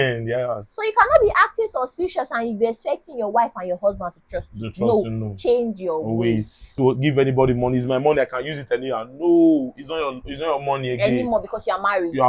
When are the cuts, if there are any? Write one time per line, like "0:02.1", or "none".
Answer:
0:06.8